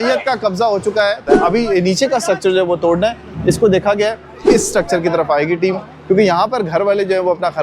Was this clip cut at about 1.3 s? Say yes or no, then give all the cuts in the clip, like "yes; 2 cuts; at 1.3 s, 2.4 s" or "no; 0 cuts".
yes; 2 cuts; at 1.3 s, 4.4 s